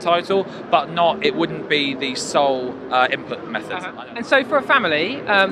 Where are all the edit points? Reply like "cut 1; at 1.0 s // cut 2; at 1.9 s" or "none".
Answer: cut 1; at 3.9 s